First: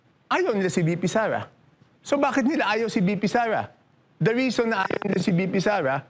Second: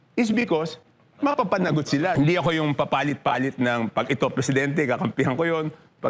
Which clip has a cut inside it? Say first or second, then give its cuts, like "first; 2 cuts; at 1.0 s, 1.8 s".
second; 1 cut; at 2.1 s